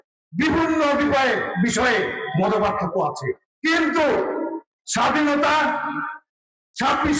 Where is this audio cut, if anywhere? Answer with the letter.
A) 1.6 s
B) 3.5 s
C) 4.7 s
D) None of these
B